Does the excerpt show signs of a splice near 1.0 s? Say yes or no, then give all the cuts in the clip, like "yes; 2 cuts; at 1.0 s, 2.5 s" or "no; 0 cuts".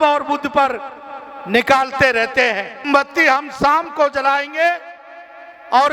no; 1 cut; at 2.9 s